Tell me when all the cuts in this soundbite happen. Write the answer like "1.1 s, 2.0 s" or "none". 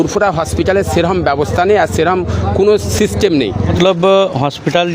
3.6 s